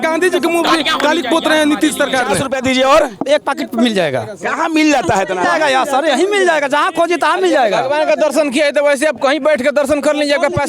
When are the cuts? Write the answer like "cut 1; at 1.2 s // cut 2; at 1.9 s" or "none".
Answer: cut 1; at 2.4 s